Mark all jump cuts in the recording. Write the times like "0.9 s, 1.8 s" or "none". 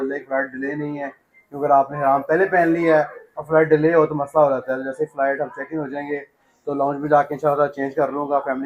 none